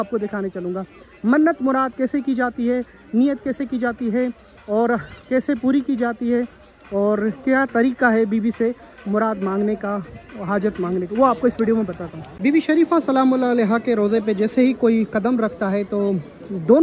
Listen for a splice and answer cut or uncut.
uncut